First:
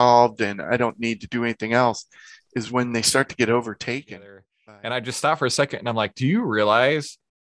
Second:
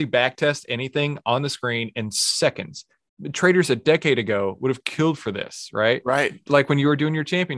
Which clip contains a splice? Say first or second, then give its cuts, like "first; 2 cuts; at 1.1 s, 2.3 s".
first; 1 cut; at 4.5 s